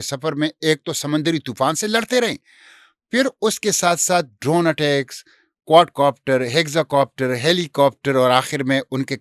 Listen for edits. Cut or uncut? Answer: uncut